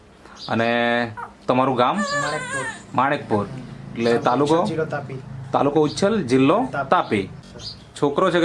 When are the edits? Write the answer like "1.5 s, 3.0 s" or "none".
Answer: 7.4 s